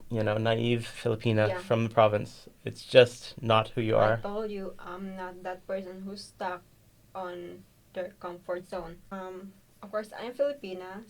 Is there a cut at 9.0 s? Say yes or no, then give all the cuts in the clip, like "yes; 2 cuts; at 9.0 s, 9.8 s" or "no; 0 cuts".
yes; 1 cut; at 9.0 s